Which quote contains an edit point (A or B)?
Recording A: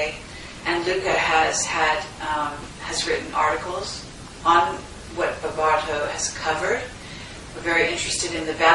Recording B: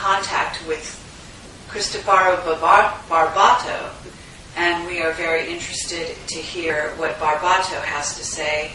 A